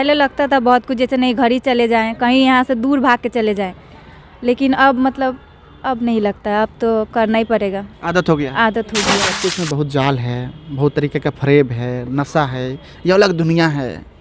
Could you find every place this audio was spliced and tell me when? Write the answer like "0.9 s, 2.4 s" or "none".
9.3 s